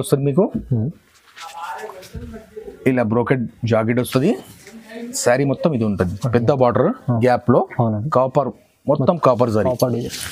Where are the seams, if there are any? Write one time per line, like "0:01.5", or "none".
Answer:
none